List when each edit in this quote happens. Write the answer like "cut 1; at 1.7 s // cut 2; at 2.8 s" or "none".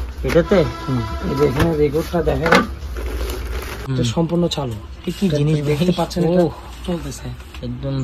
cut 1; at 3.9 s